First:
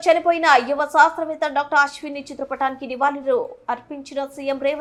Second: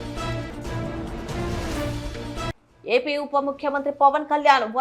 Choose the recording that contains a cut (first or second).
second